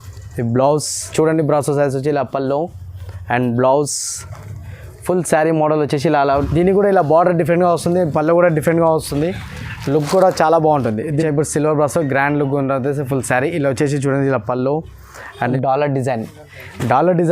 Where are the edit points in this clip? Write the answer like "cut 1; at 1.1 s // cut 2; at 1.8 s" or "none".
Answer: cut 1; at 1.1 s // cut 2; at 6.4 s // cut 3; at 11.1 s // cut 4; at 15.4 s